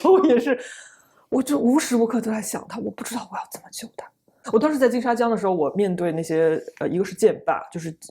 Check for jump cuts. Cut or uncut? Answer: cut